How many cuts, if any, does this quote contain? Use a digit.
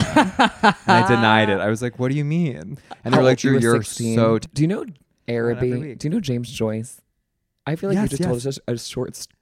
1